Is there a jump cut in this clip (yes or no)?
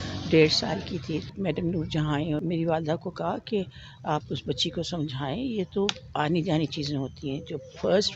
yes